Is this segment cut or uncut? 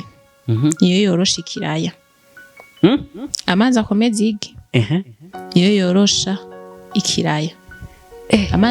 uncut